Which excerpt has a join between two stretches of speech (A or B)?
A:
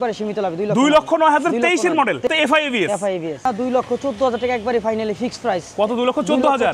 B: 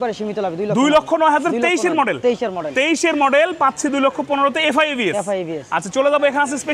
A